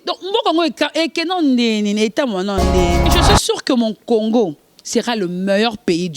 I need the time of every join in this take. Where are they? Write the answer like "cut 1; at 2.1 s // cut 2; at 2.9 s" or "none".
cut 1; at 3.1 s

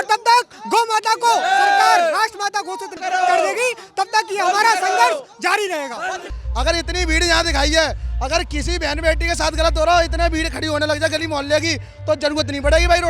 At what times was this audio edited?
cut 1; at 2.9 s // cut 2; at 6.3 s

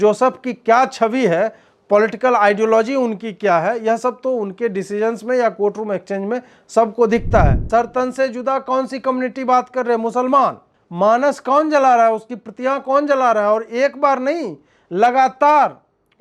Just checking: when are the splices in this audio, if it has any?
cut 1; at 7.6 s

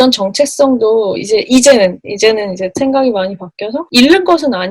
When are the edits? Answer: cut 1; at 1.1 s // cut 2; at 3.9 s

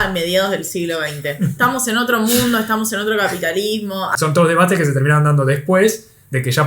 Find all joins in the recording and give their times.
cut 1; at 4.1 s

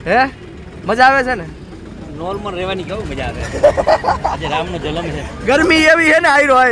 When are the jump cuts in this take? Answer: none

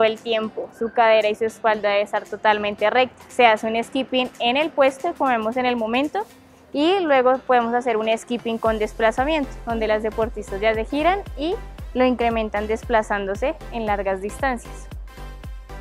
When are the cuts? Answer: cut 1; at 14.6 s

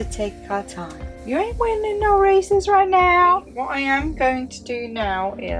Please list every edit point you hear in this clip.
cut 1; at 1.1 s // cut 2; at 3.5 s

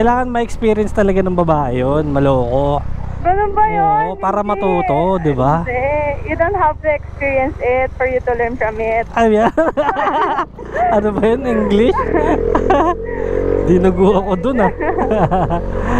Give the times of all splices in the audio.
none

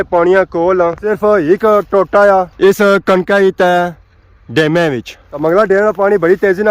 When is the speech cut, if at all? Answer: cut 1; at 1.0 s // cut 2; at 5.2 s

